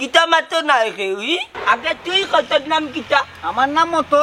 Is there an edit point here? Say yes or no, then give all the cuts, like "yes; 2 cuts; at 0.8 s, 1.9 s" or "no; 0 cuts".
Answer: yes; 1 cut; at 1.5 s